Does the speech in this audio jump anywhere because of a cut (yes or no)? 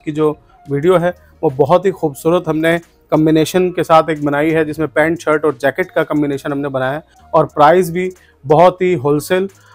no